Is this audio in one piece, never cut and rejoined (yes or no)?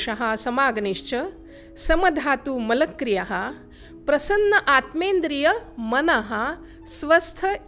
yes